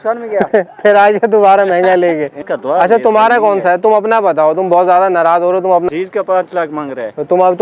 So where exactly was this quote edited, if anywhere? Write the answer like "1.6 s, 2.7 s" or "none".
2.4 s, 5.8 s